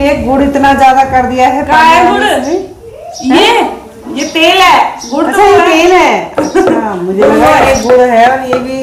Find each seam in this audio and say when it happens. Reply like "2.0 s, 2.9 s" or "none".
none